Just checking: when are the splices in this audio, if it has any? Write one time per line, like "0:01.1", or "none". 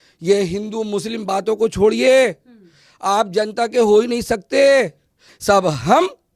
0:05.3